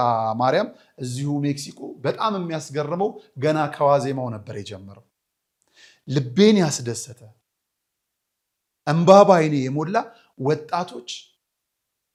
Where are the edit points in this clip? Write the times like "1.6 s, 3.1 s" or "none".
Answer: none